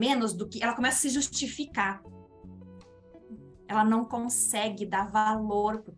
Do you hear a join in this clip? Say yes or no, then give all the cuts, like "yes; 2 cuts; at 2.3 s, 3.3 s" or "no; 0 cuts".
no; 0 cuts